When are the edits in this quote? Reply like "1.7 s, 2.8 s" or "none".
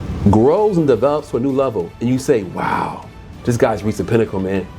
none